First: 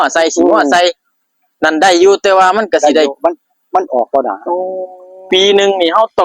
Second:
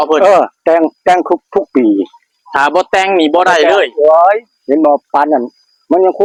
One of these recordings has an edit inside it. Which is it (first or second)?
first